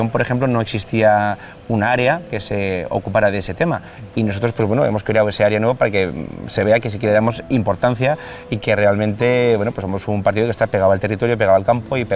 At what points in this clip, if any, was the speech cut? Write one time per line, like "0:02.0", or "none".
none